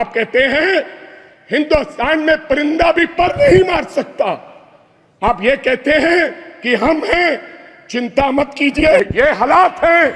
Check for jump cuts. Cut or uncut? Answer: cut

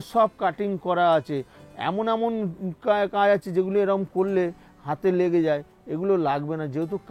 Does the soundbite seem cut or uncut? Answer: uncut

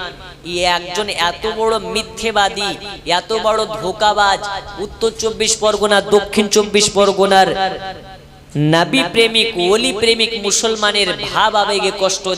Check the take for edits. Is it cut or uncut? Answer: uncut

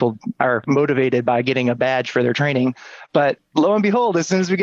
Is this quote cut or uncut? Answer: uncut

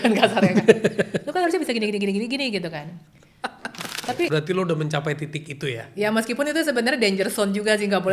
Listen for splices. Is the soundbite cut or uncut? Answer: cut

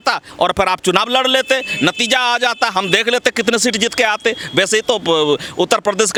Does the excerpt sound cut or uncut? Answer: uncut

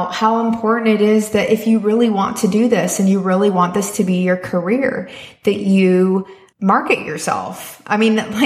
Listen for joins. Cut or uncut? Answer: cut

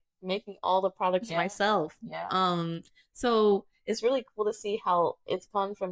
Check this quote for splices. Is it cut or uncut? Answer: uncut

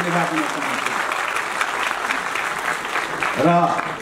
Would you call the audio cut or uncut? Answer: uncut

